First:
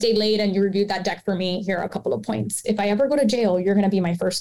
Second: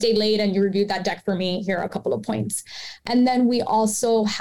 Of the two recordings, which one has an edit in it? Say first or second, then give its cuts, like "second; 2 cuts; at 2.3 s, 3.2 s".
first; 1 cut; at 2.6 s